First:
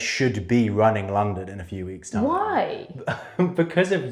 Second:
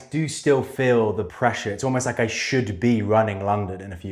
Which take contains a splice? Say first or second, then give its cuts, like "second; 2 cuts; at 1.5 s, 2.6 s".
second; 1 cut; at 1.3 s